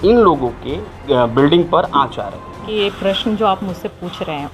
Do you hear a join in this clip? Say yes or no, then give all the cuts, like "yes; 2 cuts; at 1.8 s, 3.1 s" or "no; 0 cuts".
yes; 2 cuts; at 1.0 s, 2.6 s